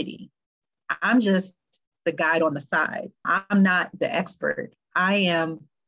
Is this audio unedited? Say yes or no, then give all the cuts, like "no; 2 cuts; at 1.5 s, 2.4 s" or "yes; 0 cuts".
yes; 0 cuts